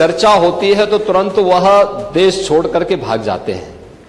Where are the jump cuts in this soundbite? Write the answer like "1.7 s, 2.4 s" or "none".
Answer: none